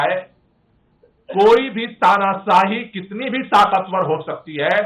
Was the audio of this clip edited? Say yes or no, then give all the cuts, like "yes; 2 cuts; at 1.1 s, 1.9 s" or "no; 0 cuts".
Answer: no; 0 cuts